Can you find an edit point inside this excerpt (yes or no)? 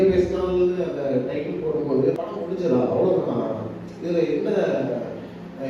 yes